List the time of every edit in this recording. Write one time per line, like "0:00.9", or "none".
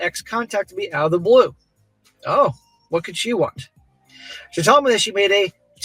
none

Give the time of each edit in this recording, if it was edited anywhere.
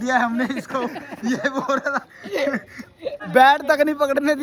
0:03.2

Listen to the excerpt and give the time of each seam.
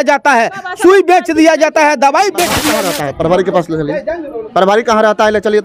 0:02.7

